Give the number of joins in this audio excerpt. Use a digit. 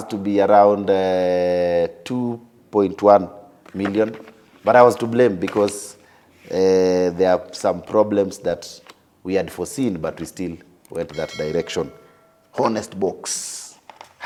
0